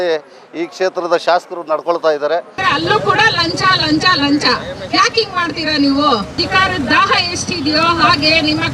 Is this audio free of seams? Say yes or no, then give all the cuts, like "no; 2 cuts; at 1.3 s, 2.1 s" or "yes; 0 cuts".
no; 2 cuts; at 2.5 s, 6.4 s